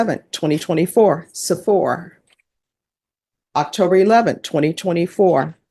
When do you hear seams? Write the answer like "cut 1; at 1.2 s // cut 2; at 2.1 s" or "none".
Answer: none